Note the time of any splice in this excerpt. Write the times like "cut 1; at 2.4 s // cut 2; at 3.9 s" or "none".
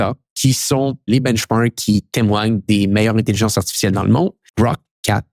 cut 1; at 1.1 s // cut 2; at 4.4 s